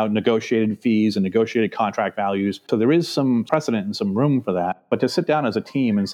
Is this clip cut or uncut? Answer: uncut